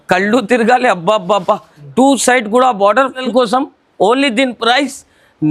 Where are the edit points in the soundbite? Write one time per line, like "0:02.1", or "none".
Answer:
0:03.2